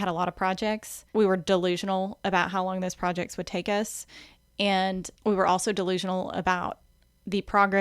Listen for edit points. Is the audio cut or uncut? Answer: cut